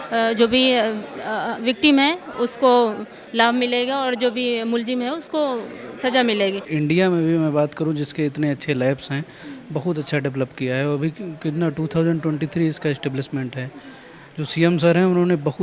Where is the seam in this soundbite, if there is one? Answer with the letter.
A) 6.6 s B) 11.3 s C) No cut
A